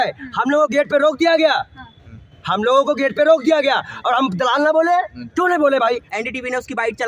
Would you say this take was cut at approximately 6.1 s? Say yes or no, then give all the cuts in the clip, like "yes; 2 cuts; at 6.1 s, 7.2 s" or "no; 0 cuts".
yes; 1 cut; at 6.1 s